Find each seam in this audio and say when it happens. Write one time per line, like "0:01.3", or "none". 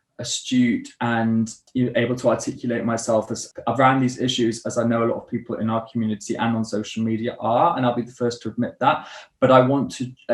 0:01.6
0:03.5